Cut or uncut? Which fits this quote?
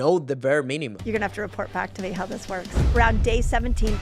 cut